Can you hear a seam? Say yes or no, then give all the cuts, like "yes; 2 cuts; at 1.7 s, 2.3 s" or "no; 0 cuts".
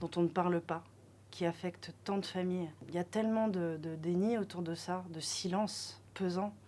no; 0 cuts